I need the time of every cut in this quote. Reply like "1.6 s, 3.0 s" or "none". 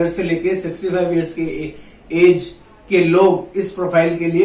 none